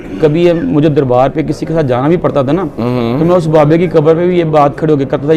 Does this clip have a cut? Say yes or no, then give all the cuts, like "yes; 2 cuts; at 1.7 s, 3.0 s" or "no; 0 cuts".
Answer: no; 0 cuts